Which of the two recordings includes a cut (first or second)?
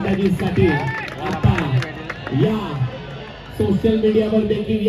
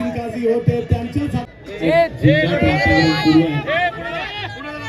second